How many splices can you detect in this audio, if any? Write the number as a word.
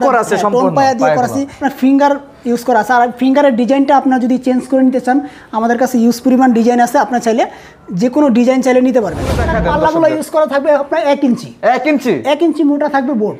two